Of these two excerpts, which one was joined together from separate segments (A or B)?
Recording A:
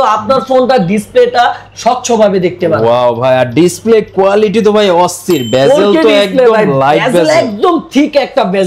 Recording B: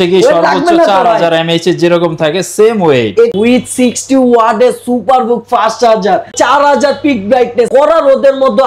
B